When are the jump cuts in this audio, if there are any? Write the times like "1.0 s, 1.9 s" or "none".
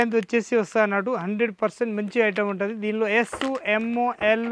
none

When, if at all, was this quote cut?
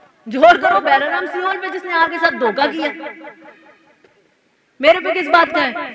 none

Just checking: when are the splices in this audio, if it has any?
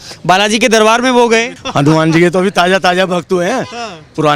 1.6 s

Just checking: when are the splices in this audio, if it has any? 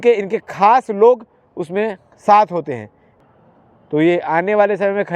3.1 s

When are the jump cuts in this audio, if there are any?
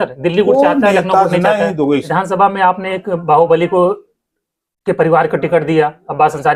2.1 s

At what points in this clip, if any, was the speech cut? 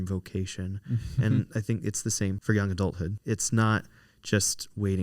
2.4 s, 3.2 s

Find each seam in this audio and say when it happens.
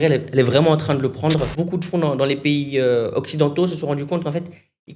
1.5 s

